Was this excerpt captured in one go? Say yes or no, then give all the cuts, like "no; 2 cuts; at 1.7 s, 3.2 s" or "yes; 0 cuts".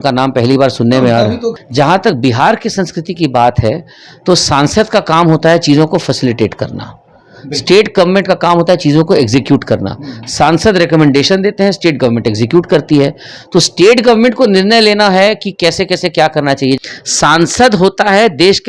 no; 2 cuts; at 1.6 s, 16.8 s